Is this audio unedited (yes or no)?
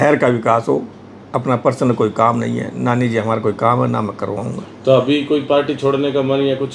yes